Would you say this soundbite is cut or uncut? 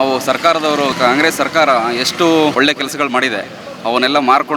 cut